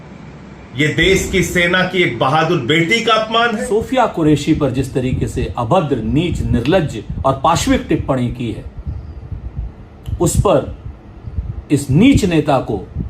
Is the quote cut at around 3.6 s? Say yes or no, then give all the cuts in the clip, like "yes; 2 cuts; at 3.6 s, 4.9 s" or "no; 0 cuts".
yes; 1 cut; at 3.6 s